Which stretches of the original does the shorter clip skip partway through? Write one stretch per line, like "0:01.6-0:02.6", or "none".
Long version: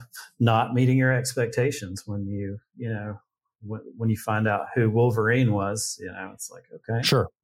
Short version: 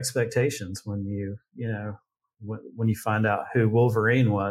none